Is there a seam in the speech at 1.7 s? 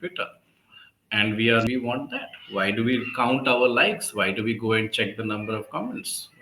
yes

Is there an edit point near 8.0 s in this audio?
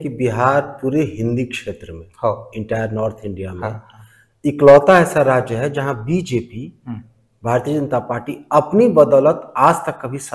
no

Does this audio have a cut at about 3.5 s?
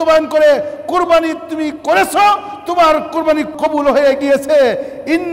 yes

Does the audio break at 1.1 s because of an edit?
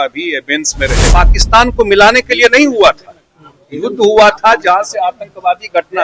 yes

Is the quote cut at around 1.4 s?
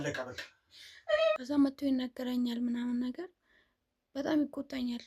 yes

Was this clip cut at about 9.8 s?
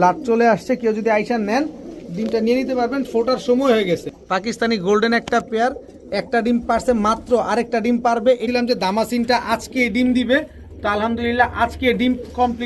no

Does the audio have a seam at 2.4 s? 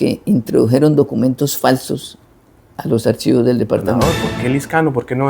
no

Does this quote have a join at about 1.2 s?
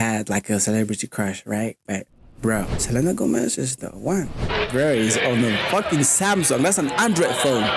no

